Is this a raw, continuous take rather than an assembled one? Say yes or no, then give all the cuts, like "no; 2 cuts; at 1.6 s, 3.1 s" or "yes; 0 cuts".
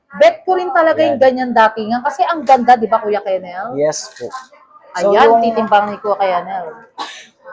yes; 0 cuts